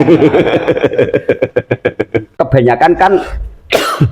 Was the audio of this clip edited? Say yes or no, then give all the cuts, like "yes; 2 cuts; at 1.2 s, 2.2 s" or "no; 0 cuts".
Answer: yes; 1 cut; at 2.4 s